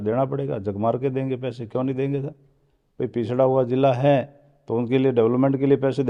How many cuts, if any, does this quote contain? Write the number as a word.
zero